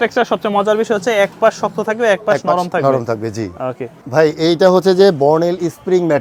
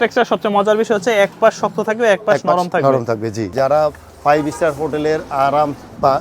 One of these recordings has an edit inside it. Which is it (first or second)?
second